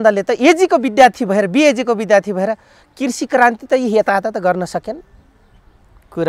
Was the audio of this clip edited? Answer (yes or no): no